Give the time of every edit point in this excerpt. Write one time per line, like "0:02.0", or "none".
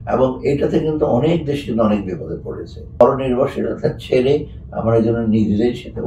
0:03.0